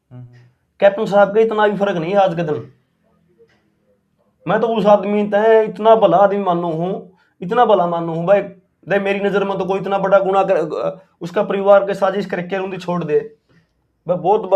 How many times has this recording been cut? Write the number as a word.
zero